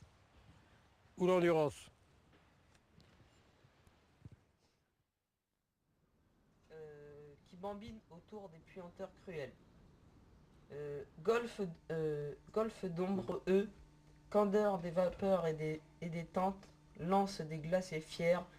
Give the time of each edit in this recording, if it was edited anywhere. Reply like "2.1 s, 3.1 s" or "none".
8.5 s